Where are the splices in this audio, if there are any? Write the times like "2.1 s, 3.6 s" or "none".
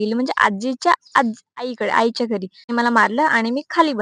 2.7 s